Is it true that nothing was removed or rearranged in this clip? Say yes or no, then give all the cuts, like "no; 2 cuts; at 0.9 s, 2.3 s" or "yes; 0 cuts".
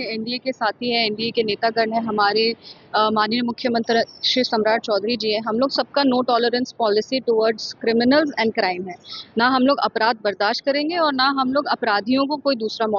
yes; 0 cuts